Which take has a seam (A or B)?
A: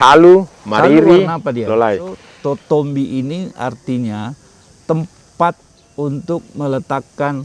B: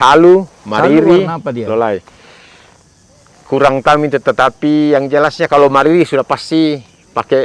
A